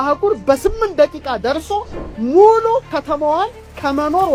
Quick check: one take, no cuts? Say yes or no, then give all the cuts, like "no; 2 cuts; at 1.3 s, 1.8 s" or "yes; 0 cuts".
yes; 0 cuts